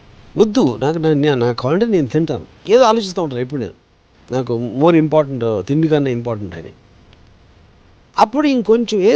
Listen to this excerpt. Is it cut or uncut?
cut